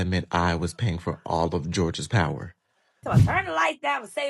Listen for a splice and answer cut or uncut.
cut